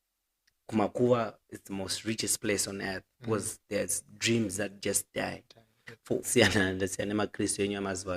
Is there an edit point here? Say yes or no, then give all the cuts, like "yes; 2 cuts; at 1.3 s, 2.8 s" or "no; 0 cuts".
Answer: yes; 1 cut; at 6.3 s